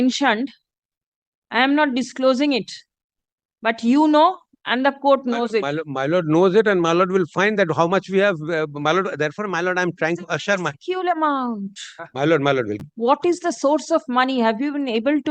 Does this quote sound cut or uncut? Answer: cut